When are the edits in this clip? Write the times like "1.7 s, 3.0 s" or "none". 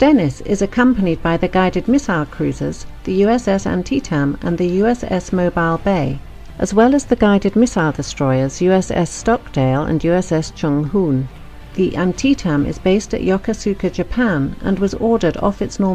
none